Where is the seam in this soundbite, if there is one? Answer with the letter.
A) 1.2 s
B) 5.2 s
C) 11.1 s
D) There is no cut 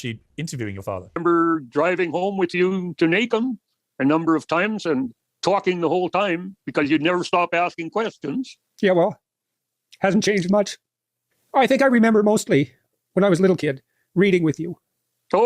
A